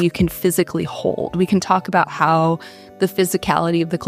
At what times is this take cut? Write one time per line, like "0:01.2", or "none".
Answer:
0:02.8